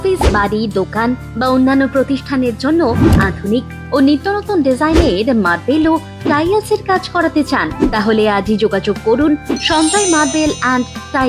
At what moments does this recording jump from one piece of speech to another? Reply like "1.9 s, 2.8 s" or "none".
none